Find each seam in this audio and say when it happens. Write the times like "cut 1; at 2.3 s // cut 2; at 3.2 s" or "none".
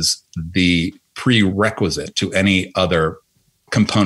cut 1; at 1.5 s